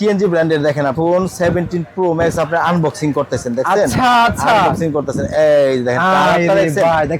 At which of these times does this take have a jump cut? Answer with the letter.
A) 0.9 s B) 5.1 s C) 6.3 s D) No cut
A